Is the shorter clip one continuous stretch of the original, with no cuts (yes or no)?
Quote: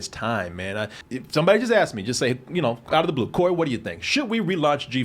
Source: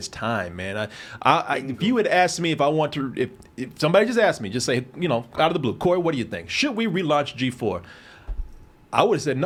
no